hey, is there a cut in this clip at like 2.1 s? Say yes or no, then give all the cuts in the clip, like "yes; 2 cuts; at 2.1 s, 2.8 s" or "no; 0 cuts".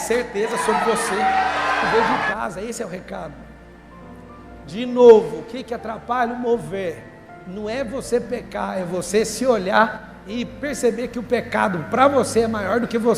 yes; 1 cut; at 2.1 s